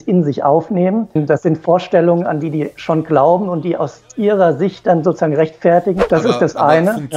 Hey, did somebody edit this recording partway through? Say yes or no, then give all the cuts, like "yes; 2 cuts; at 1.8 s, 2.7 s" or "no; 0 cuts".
yes; 2 cuts; at 1.2 s, 6.0 s